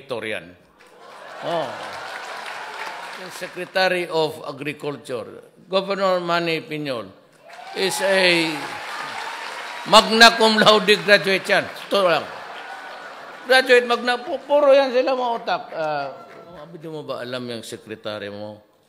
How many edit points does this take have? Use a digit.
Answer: 2